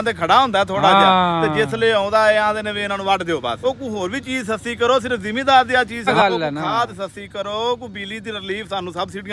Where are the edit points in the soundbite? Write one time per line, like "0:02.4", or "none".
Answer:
0:03.6
0:06.1